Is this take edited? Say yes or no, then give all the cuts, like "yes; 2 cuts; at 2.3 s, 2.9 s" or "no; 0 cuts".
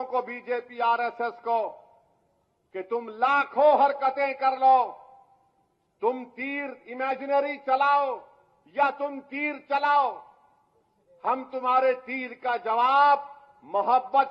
no; 0 cuts